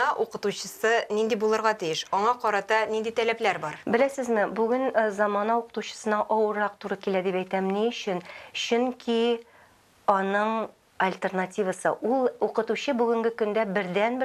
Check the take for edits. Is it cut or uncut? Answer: uncut